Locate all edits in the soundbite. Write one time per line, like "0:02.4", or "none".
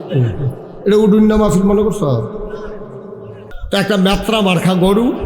0:03.5